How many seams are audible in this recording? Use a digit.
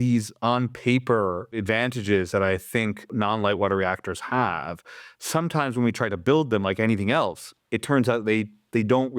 2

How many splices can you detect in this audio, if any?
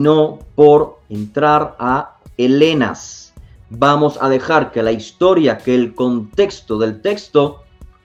0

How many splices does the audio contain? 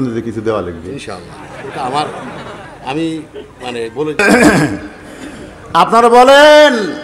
1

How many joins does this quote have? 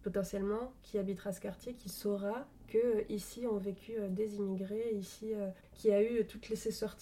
2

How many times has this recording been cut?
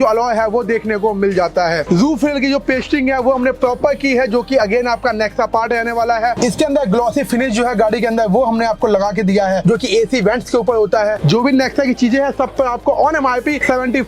3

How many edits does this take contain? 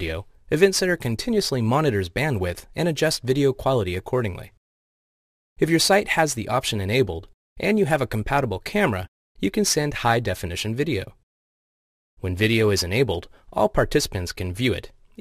1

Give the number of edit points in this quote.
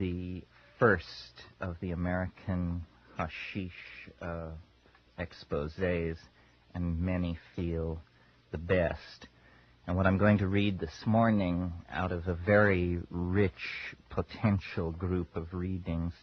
1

